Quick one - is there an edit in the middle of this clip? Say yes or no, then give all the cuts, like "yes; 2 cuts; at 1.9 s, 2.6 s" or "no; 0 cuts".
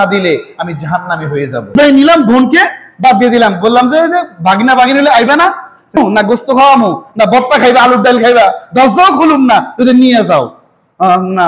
yes; 2 cuts; at 1.7 s, 6.0 s